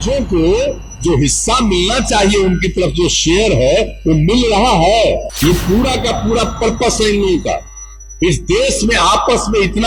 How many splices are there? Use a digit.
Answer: 1